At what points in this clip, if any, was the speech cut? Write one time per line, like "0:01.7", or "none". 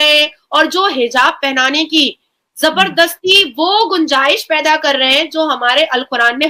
none